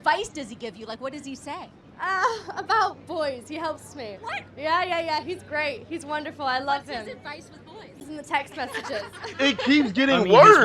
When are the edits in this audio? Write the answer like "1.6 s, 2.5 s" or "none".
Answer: 7.9 s